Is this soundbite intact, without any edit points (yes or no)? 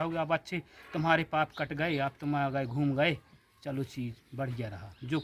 yes